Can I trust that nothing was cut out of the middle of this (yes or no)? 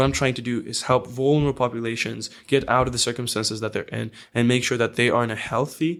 yes